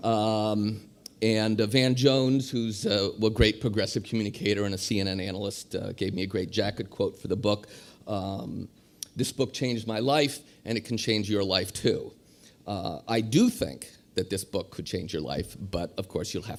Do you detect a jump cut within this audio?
no; 0 cuts

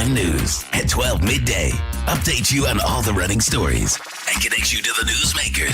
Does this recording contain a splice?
no; 0 cuts

